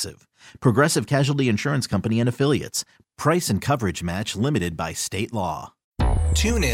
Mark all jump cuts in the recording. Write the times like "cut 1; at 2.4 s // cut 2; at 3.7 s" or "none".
cut 1; at 5.8 s